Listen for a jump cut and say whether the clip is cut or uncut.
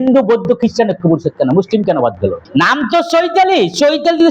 cut